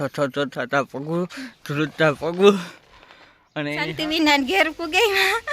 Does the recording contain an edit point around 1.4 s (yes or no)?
no